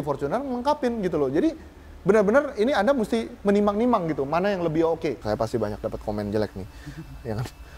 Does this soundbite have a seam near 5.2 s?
yes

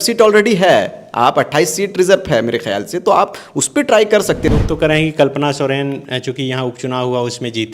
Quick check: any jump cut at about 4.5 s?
yes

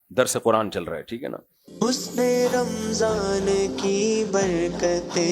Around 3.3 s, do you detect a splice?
no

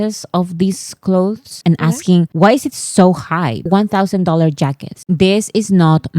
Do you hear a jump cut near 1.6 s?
no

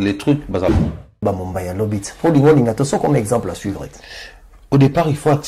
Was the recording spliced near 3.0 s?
no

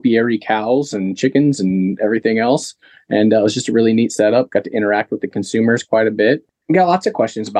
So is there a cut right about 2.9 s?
no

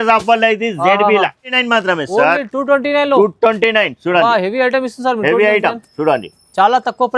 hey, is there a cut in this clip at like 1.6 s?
yes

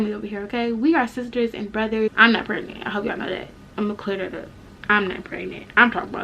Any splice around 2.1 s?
yes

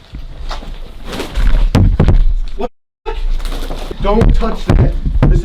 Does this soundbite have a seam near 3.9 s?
yes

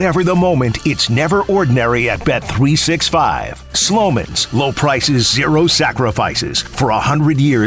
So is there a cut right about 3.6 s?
no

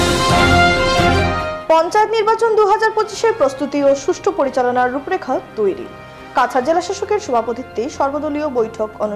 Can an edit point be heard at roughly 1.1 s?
yes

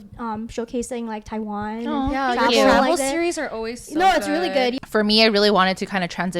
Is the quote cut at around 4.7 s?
yes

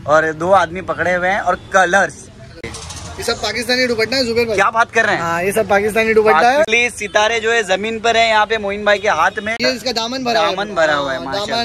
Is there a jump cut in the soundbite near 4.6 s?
no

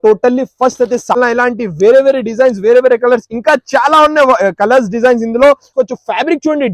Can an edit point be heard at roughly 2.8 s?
no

